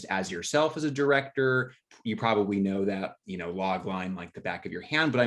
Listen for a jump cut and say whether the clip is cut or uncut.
uncut